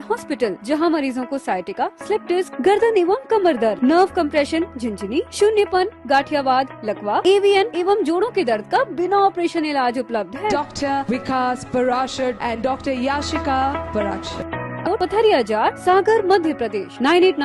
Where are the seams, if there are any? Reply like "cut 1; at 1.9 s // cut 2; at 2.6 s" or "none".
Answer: cut 1; at 14.9 s